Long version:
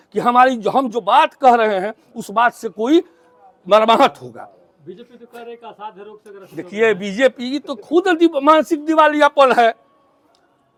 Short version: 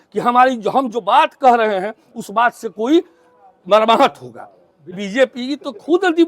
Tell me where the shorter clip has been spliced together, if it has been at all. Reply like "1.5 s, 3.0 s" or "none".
5.0 s